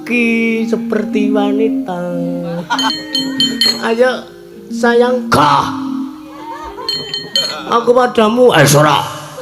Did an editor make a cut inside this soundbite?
yes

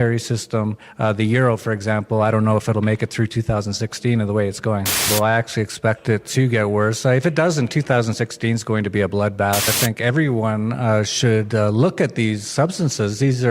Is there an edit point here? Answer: yes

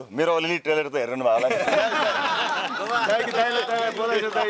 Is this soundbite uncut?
yes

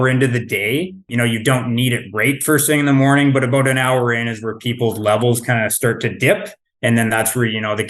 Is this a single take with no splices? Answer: no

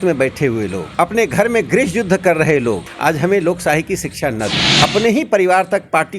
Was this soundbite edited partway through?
yes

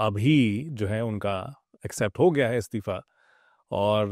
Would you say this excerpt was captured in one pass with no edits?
yes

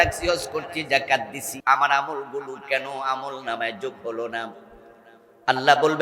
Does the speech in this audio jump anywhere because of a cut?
yes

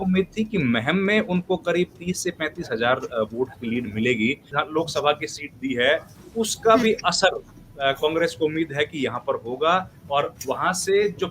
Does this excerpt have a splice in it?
yes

